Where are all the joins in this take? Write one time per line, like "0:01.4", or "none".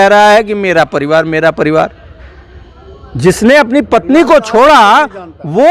none